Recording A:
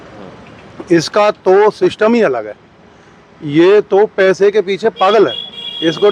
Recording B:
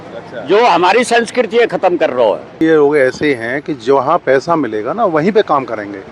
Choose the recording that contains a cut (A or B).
B